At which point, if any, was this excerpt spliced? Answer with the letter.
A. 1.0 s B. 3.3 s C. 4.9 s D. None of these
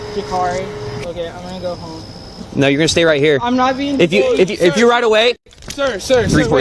A